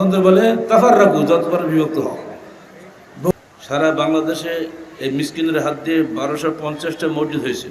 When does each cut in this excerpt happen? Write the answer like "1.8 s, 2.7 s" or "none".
3.3 s